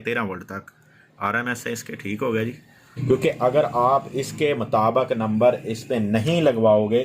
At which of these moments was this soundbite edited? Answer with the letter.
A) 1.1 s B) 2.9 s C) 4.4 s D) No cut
B